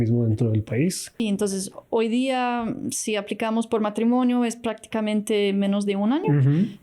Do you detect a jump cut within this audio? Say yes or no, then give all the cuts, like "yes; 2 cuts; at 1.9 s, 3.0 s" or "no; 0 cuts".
yes; 1 cut; at 1.1 s